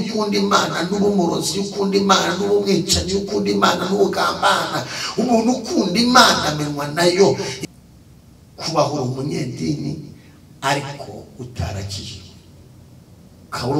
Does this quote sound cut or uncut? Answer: cut